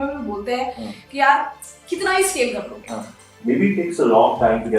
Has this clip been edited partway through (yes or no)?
yes